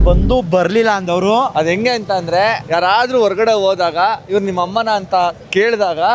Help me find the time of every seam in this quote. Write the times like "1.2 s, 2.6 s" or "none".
1.5 s